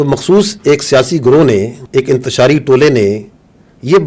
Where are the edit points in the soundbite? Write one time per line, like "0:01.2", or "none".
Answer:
0:01.8